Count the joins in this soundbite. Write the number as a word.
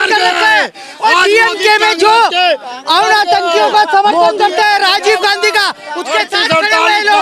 zero